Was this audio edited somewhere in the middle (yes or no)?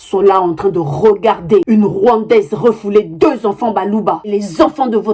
yes